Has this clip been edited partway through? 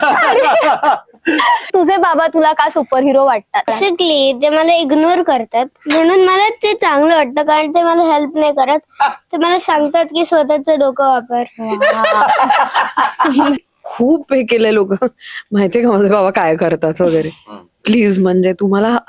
yes; 3 cuts; at 1.7 s, 3.7 s, 13.6 s

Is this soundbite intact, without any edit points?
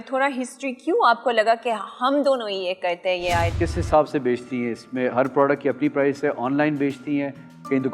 no; 1 cut; at 3.5 s

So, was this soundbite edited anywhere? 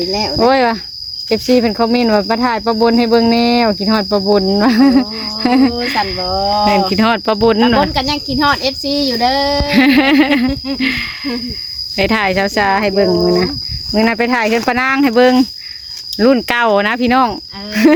no; 0 cuts

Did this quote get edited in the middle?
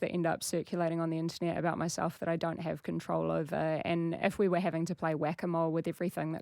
yes; 1 cut; at 3.8 s

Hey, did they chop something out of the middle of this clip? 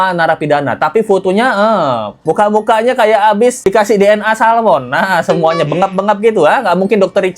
yes; 1 cut; at 2.1 s

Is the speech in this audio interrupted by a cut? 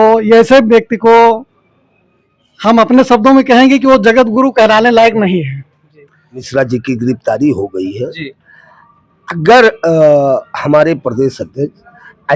yes; 1 cut; at 6.5 s

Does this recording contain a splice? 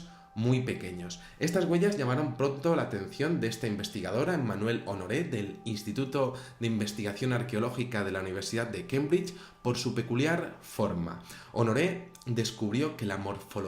yes; 1 cut; at 3.9 s

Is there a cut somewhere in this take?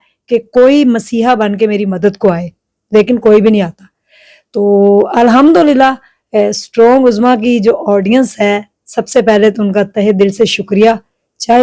no; 0 cuts

